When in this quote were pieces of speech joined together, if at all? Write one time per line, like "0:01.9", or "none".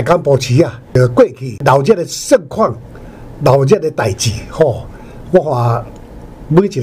0:00.9
0:01.6